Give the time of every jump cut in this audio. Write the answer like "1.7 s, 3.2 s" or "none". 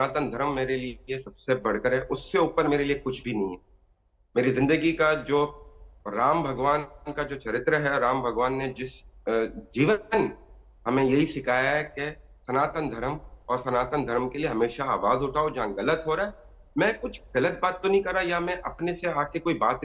none